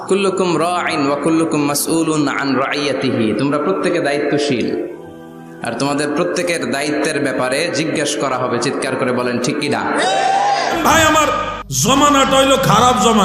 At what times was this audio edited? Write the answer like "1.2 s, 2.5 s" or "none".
10.8 s